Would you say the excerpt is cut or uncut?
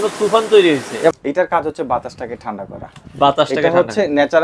cut